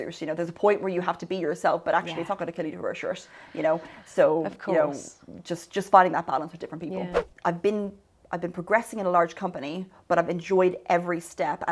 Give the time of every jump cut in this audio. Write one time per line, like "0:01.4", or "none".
0:07.2